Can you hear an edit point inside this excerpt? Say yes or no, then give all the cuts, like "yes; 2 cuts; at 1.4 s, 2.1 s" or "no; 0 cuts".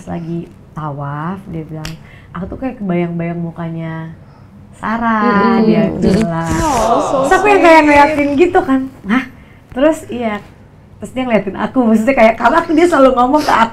no; 0 cuts